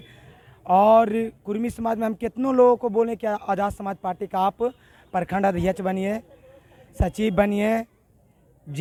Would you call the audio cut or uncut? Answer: uncut